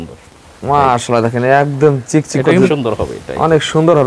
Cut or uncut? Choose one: cut